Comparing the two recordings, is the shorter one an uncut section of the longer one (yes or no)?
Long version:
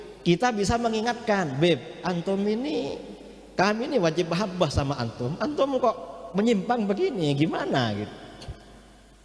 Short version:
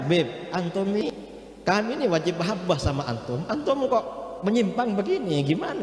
no